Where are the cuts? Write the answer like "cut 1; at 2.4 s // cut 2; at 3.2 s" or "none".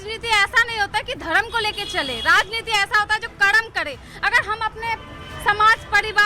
none